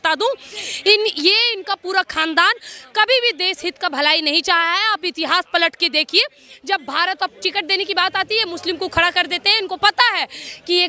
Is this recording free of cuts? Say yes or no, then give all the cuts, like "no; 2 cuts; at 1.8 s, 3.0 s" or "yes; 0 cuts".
no; 1 cut; at 7.3 s